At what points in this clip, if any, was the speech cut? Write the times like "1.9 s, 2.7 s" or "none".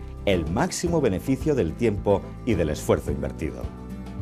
none